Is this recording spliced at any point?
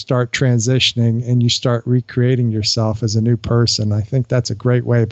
no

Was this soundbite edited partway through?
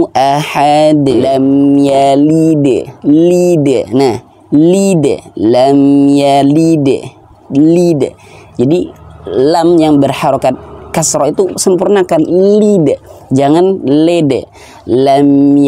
yes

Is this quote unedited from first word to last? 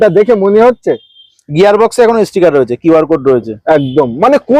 yes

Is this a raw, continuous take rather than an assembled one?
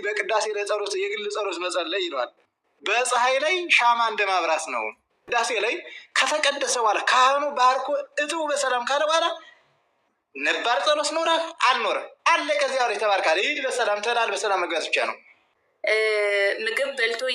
no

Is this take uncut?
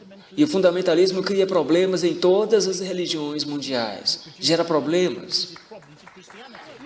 yes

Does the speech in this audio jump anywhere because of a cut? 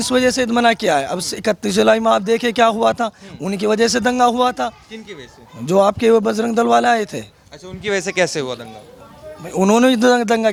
no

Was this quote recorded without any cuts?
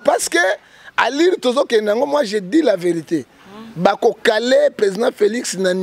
yes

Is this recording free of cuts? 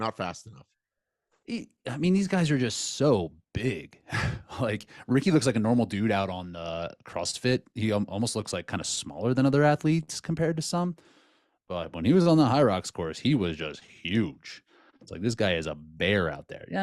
yes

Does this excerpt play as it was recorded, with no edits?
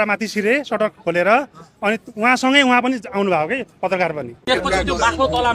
no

